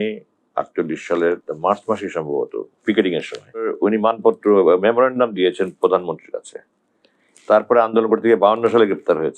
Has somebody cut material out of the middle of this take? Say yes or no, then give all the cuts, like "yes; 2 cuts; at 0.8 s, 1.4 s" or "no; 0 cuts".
yes; 2 cuts; at 1.5 s, 3.7 s